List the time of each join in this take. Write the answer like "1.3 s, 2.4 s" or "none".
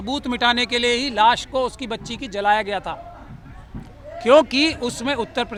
none

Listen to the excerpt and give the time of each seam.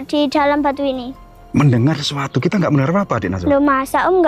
none

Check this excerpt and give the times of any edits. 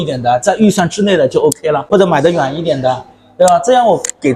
1.8 s

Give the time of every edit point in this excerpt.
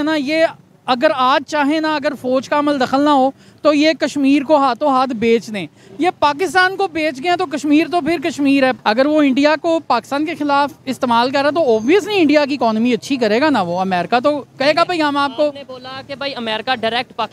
8.8 s

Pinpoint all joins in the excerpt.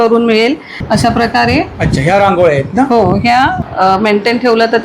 0.8 s, 3.6 s

